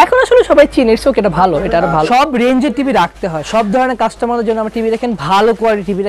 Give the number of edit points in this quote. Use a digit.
1